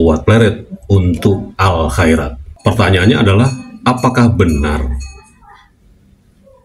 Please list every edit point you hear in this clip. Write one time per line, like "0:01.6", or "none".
0:02.4